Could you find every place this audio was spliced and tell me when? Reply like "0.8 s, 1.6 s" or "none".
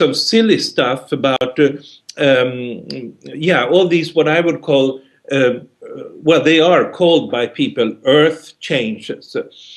6.2 s